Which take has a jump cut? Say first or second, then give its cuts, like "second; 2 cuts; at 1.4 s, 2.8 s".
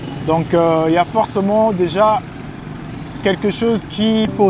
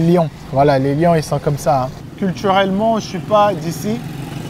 second; 1 cut; at 2.0 s